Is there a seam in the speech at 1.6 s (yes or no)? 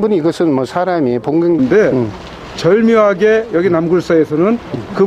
no